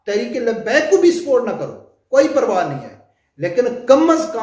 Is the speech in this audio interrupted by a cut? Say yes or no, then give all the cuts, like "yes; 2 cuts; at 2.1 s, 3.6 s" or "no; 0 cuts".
no; 0 cuts